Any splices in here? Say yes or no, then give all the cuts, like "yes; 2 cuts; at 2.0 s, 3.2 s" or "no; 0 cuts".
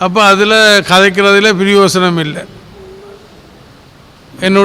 yes; 1 cut; at 2.7 s